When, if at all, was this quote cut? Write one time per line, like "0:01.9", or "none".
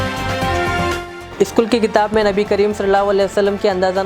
0:00.9